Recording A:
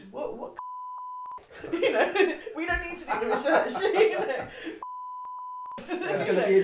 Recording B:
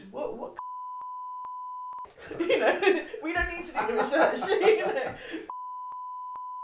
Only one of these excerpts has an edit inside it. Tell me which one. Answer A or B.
A